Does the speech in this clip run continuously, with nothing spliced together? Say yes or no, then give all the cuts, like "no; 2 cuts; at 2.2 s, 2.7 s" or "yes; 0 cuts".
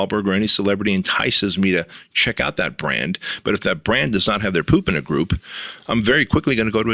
yes; 0 cuts